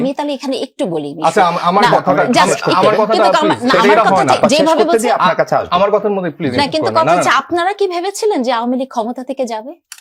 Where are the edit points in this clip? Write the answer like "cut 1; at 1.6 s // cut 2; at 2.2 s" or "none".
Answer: none